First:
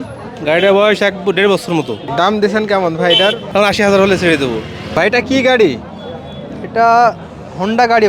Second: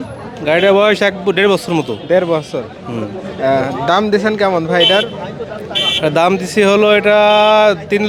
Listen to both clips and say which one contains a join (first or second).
first